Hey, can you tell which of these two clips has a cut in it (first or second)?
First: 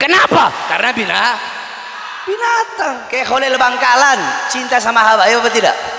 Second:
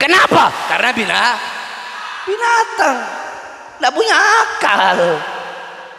first